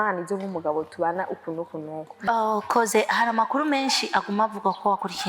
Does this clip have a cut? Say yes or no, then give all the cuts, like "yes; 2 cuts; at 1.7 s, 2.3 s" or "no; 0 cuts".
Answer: yes; 1 cut; at 2.0 s